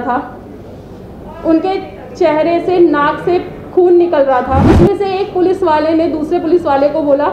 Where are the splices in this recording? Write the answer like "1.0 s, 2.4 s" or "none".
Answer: 4.6 s